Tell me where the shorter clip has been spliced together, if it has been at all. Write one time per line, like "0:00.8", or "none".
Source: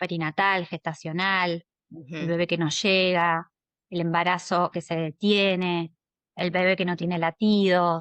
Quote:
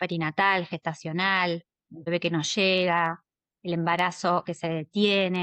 0:02.1